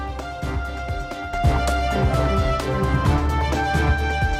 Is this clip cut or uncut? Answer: cut